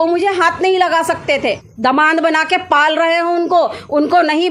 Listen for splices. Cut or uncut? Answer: cut